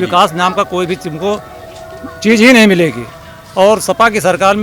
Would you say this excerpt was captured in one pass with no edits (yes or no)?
yes